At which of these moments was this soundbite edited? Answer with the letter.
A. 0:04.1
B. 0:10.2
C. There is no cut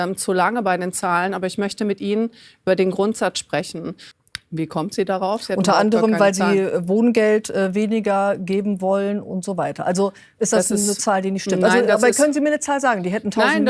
A